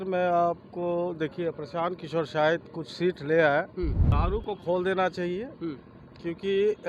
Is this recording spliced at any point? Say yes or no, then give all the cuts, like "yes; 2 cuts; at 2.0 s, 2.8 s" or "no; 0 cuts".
yes; 1 cut; at 4.1 s